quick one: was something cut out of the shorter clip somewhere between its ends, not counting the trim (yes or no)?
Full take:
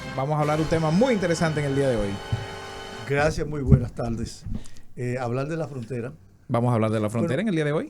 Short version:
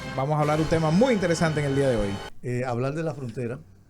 yes